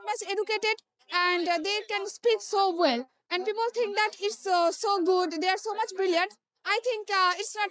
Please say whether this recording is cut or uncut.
uncut